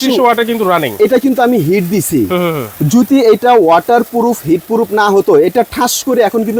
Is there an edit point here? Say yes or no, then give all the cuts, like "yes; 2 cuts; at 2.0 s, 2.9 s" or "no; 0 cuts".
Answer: no; 0 cuts